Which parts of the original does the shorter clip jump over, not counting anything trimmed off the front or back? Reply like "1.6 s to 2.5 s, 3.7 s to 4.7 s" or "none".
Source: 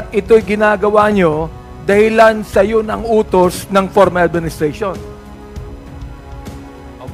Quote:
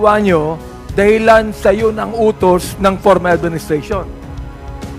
4.9 s to 5.7 s

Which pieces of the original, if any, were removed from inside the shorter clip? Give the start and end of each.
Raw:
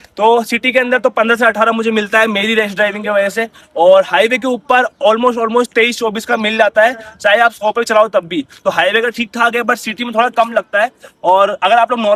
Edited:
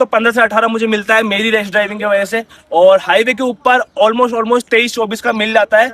none

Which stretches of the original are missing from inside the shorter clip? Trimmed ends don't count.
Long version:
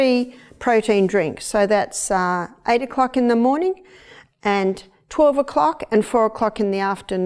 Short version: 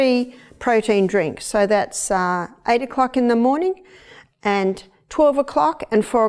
none

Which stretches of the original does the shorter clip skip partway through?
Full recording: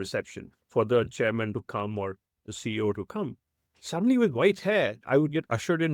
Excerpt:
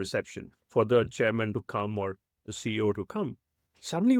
none

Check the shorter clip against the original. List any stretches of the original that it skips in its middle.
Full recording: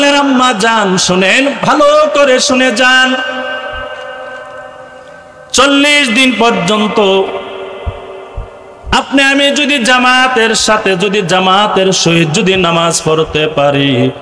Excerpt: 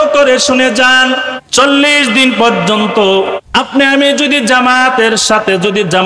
3.4 s to 5.4 s, 7.4 s to 8.8 s

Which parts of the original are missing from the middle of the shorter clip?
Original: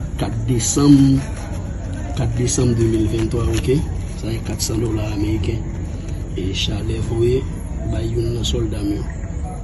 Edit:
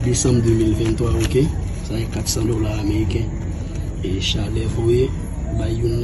none

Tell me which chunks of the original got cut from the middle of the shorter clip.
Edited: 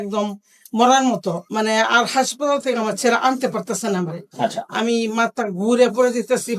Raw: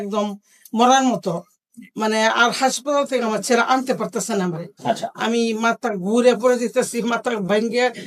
1.4 s to 1.9 s

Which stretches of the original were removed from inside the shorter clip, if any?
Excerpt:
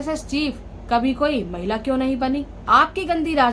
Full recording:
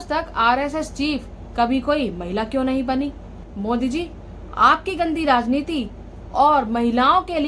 3.2 s to 4.4 s

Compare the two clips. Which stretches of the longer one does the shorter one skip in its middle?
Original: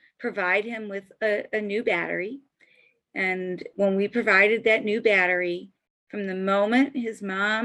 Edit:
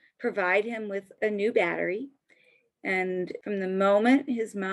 1.1 s to 1.5 s, 3.6 s to 6.0 s

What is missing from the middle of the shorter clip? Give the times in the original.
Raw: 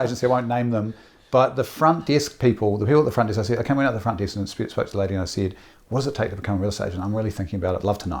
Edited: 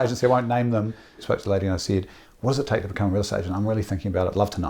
1.1 s to 4.6 s

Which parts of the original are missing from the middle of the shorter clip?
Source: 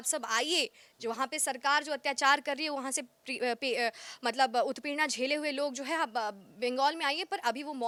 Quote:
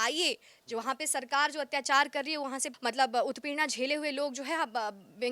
3.0 s to 4.1 s

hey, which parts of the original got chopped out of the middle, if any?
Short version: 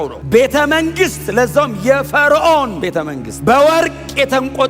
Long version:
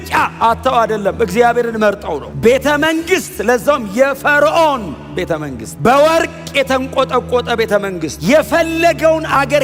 5.1 s to 5.4 s

